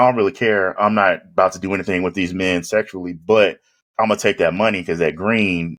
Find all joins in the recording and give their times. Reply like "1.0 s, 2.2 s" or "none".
none